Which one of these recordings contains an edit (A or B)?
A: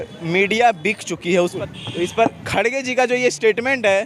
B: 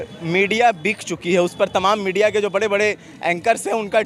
A